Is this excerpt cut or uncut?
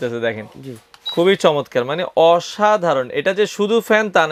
uncut